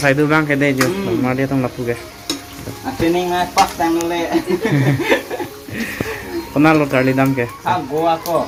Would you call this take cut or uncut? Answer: uncut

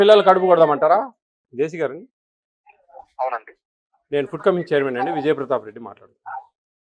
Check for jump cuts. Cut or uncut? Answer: cut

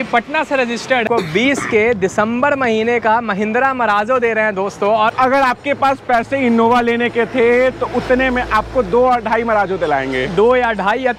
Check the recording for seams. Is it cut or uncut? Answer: cut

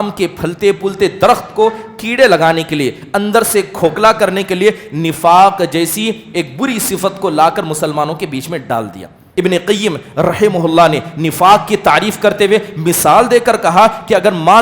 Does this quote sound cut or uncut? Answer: cut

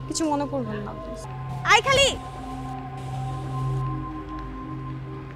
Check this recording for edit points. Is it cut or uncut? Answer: cut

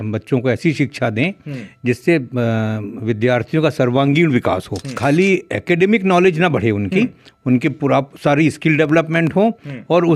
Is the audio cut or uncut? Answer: cut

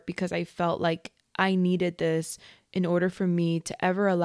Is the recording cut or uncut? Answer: uncut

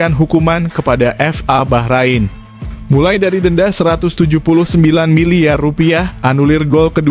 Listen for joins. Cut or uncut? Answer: uncut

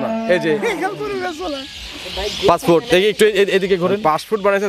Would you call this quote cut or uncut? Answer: uncut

